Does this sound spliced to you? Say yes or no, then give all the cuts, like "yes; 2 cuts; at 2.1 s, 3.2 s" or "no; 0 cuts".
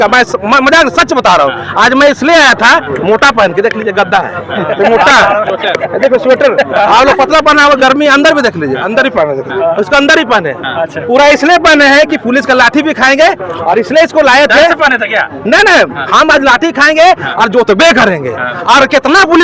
no; 0 cuts